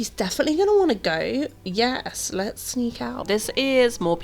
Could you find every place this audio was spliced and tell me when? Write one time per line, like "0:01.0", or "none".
0:03.2